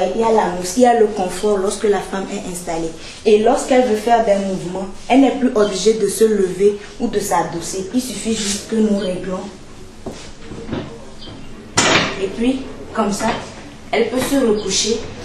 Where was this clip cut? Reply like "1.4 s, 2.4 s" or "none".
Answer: none